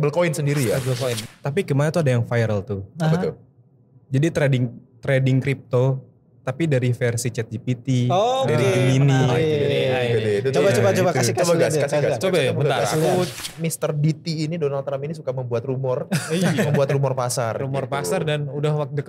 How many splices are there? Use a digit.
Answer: 2